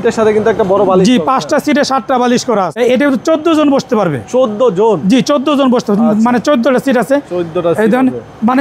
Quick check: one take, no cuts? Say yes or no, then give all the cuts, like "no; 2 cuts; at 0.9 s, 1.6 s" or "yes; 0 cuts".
no; 1 cut; at 2.7 s